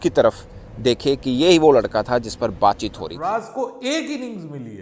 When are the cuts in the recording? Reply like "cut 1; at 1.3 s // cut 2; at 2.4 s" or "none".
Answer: cut 1; at 3.1 s